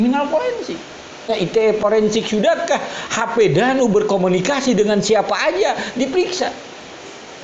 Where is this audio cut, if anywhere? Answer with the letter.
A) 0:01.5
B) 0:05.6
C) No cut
A